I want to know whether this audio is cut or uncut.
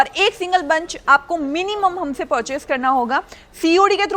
uncut